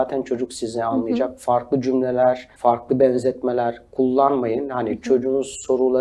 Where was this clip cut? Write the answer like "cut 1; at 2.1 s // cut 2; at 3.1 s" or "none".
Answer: cut 1; at 2.5 s